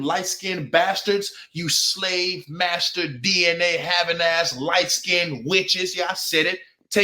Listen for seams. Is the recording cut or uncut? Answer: uncut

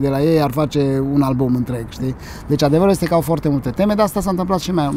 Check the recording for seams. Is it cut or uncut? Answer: uncut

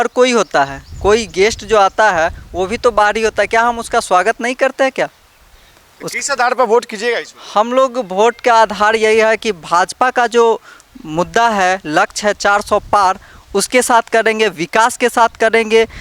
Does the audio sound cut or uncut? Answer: uncut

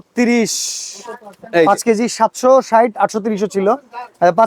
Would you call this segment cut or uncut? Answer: uncut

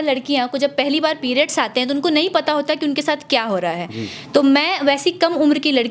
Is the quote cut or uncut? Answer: uncut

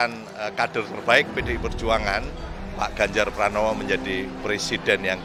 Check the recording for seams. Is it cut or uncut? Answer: uncut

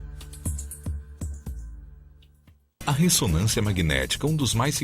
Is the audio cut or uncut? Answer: cut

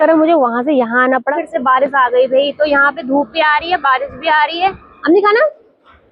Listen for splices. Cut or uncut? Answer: cut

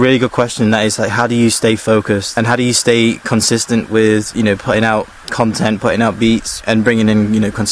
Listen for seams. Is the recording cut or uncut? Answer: uncut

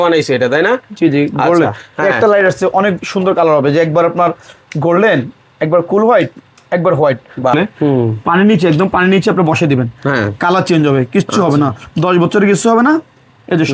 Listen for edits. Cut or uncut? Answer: cut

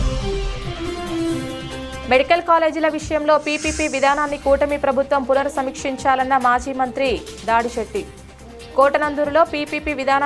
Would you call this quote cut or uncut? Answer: cut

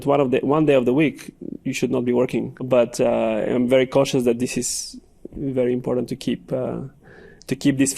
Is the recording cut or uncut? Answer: cut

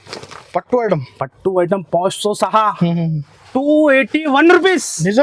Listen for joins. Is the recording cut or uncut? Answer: uncut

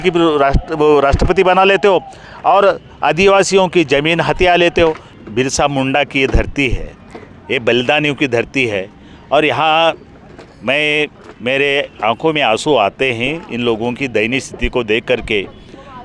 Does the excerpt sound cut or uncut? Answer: cut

